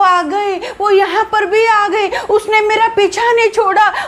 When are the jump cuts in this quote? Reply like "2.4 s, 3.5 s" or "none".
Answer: none